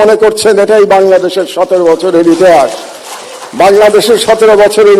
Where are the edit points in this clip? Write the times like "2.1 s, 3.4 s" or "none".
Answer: none